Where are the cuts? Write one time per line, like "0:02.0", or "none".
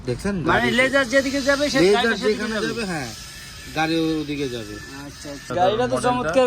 0:05.5